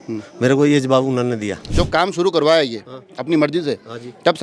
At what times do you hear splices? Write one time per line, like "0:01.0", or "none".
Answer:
0:01.7